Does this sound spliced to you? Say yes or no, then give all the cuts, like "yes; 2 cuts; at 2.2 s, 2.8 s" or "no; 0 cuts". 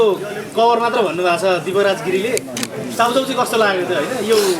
no; 0 cuts